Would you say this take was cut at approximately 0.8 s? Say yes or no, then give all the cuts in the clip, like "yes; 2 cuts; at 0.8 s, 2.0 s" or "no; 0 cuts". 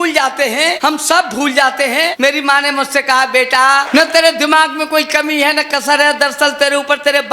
yes; 3 cuts; at 0.8 s, 2.1 s, 3.9 s